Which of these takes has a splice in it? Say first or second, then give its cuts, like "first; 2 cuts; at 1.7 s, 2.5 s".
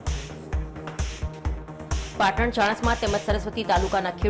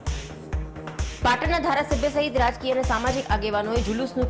first; 1 cut; at 1.0 s